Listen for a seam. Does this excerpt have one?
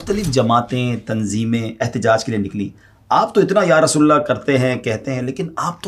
no; 0 cuts

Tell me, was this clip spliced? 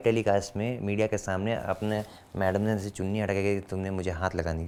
no; 0 cuts

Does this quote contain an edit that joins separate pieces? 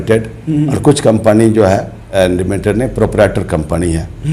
yes; 1 cut; at 2.1 s

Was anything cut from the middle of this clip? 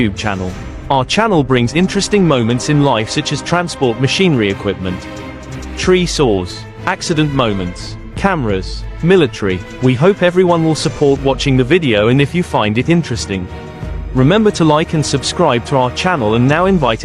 no; 0 cuts

